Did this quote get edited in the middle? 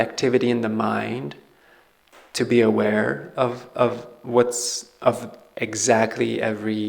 no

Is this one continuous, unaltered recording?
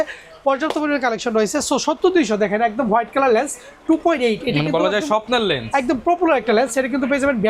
yes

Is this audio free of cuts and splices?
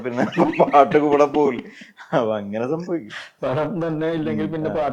yes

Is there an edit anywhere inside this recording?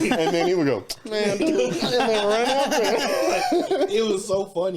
no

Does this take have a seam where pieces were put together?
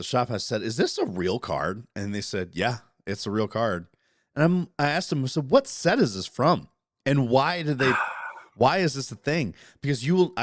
no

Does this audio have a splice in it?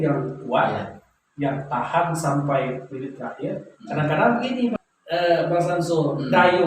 yes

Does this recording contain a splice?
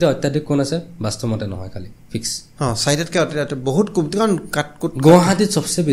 no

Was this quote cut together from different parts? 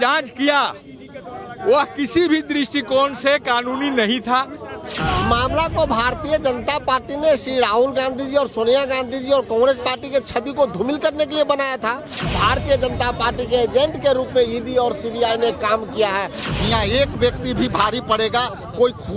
yes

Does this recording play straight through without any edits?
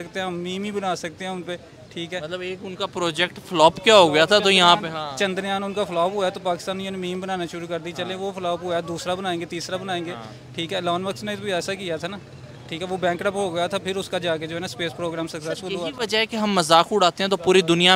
yes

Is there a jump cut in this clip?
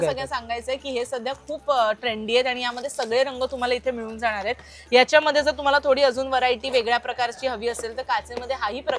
no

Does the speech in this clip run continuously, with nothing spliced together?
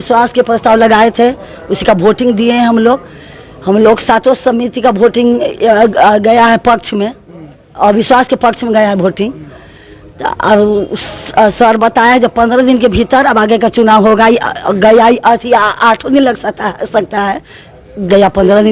yes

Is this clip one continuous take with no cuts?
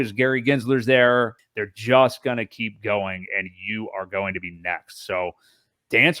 no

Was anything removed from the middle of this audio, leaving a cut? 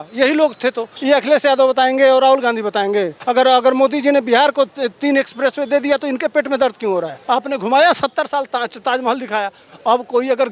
yes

